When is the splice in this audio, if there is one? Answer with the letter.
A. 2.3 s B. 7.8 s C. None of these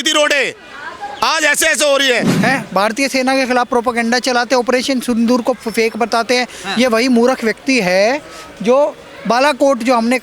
A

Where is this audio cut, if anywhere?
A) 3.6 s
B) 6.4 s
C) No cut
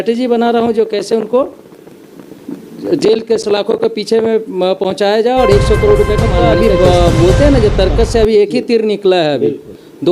B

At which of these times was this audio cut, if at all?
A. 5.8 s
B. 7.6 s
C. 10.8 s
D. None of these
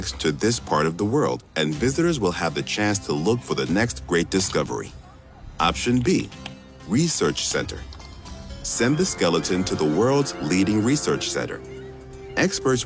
A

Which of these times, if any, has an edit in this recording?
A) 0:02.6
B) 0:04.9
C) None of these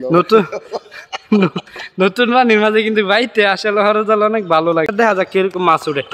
B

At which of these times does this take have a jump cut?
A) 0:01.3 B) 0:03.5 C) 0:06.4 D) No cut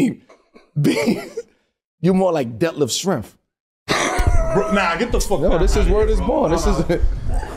D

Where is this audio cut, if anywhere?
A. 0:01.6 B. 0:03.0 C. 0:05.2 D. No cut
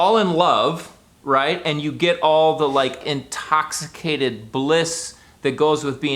B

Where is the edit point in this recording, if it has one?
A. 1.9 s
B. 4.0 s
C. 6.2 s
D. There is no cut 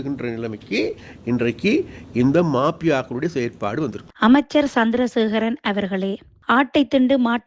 B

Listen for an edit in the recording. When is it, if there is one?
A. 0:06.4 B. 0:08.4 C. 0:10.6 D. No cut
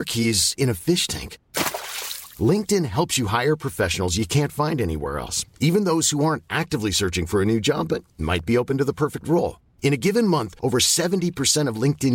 D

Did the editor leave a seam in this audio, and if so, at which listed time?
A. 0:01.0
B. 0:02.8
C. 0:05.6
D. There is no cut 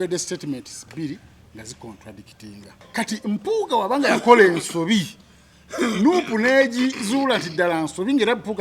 B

